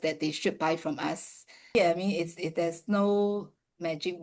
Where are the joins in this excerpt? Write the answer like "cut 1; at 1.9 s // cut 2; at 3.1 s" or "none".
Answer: cut 1; at 1.7 s